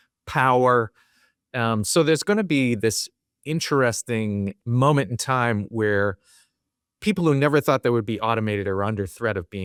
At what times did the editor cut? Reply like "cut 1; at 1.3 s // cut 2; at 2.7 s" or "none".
none